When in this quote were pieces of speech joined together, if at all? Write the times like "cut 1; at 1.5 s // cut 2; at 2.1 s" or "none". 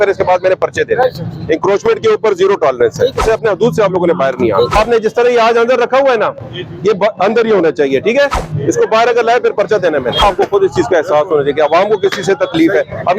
cut 1; at 3.2 s // cut 2; at 4.8 s // cut 3; at 10.2 s